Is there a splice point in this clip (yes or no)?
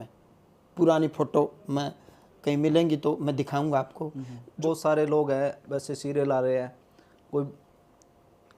yes